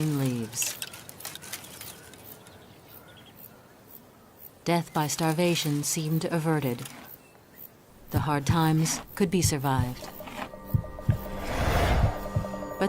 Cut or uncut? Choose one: cut